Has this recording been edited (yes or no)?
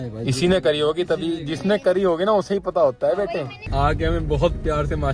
yes